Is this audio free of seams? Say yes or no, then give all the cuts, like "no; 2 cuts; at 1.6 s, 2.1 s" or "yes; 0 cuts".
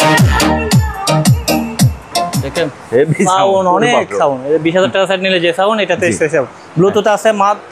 yes; 0 cuts